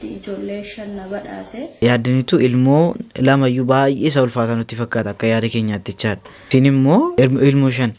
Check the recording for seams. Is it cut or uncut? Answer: cut